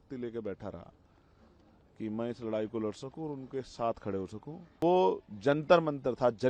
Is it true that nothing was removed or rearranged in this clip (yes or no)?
no